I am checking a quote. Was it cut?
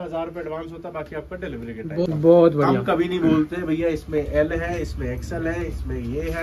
yes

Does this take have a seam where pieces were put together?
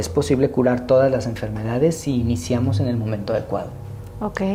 no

